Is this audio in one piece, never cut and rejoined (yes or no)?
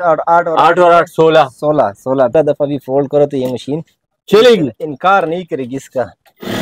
no